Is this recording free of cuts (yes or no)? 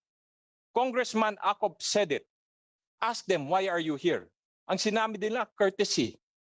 yes